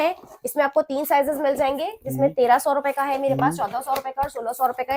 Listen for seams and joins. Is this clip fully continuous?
yes; 0 cuts

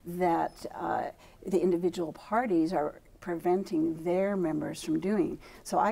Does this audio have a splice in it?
no; 0 cuts

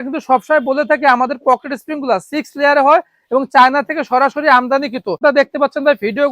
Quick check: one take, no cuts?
no; 1 cut; at 5.2 s

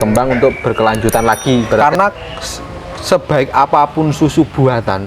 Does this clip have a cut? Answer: yes; 1 cut; at 1.8 s

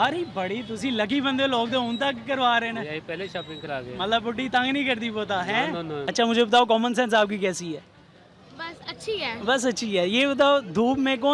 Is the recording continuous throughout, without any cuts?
no; 1 cut; at 6.1 s

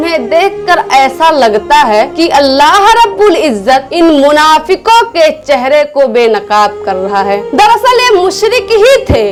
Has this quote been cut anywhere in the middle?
no; 0 cuts

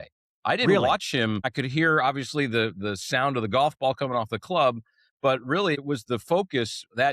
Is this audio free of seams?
no; 2 cuts; at 1.5 s, 5.8 s

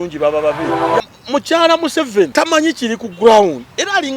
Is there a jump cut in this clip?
yes; 2 cuts; at 1.0 s, 2.3 s

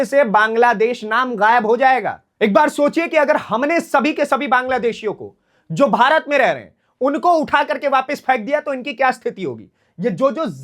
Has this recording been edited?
yes; 1 cut; at 2.2 s

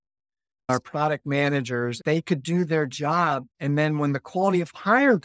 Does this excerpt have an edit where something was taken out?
yes; 3 cuts; at 0.7 s, 2.0 s, 3.5 s

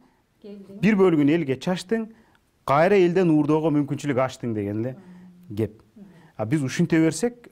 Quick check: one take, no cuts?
yes; 0 cuts

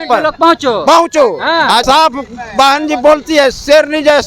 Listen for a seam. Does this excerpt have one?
yes; 1 cut; at 1.8 s

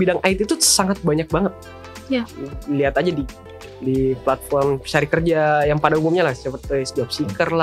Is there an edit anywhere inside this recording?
no; 0 cuts

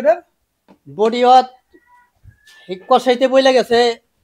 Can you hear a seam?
no; 0 cuts

